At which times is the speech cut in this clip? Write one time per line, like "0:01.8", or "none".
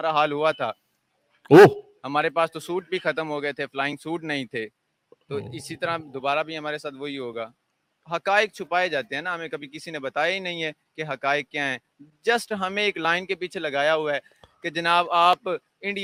none